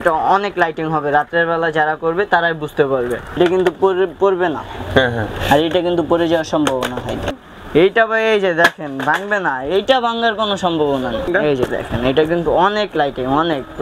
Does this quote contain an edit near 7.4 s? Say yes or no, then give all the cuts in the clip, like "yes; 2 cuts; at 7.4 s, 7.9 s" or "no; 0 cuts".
yes; 3 cuts; at 3.4 s, 7.4 s, 11.3 s